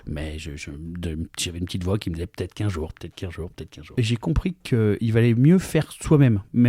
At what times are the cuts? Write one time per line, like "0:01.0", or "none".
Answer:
0:03.9